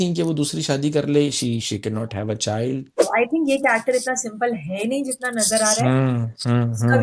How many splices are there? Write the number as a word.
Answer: one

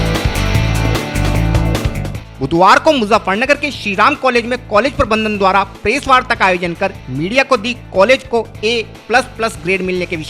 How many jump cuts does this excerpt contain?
one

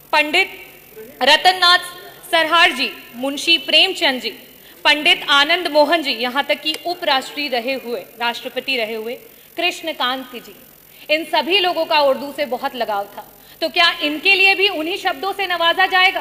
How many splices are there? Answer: zero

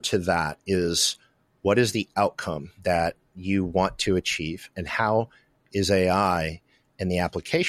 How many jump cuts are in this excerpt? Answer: one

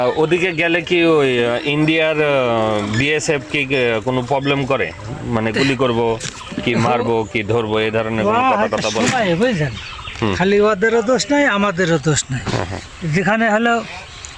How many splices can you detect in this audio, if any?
zero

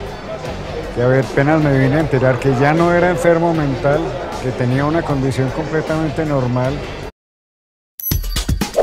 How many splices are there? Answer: zero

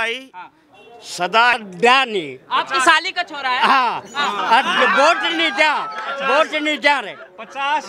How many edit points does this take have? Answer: one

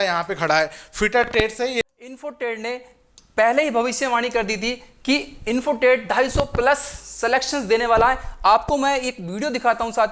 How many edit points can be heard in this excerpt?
one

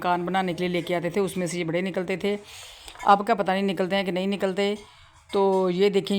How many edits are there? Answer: zero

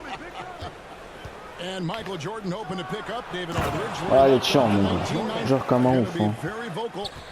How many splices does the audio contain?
one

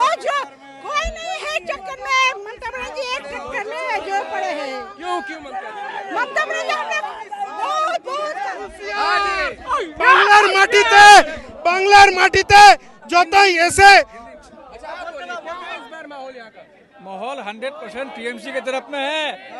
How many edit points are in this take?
zero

